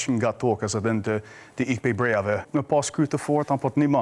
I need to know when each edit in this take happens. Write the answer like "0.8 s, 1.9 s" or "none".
2.4 s